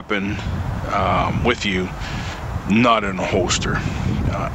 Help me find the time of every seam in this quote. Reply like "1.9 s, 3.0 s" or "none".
none

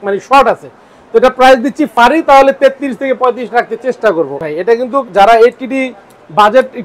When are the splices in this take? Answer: 1.9 s, 4.3 s

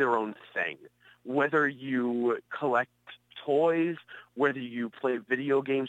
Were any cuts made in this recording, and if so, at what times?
2.5 s

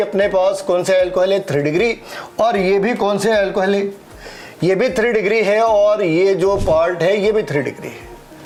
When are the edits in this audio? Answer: none

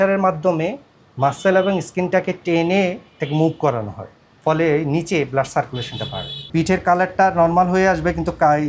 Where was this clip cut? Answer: 6.5 s

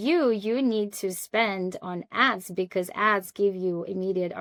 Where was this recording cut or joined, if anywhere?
none

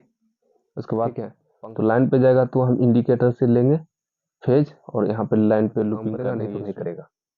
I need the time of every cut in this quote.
1.4 s, 6.2 s

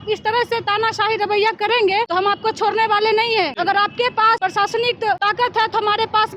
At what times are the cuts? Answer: 2.1 s, 3.5 s, 4.4 s, 5.2 s

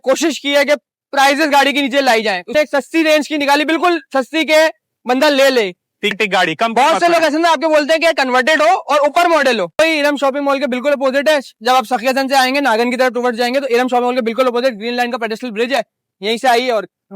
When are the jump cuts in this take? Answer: 2.5 s, 6.1 s, 9.8 s

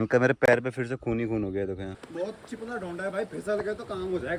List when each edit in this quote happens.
2.0 s

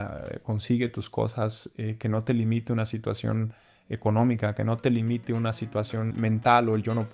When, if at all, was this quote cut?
6.1 s

